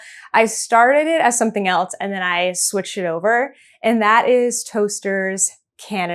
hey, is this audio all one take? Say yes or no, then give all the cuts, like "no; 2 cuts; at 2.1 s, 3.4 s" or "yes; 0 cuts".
yes; 0 cuts